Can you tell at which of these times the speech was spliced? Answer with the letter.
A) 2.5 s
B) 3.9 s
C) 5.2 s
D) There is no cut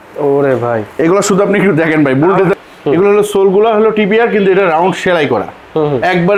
A